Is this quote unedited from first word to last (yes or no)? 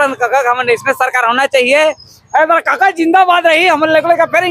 yes